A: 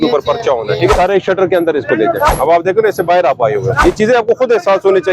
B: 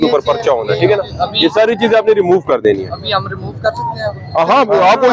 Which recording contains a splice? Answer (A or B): A